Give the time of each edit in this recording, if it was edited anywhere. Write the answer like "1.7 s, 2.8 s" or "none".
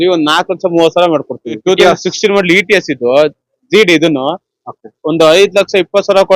1.6 s